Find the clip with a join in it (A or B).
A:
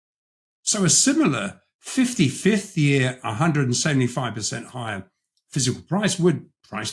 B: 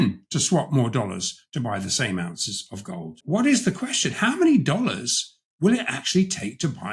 B